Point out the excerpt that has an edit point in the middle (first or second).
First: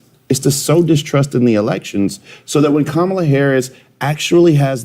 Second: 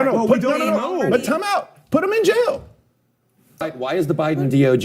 second